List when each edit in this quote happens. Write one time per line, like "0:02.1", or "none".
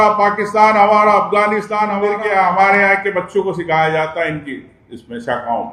0:01.9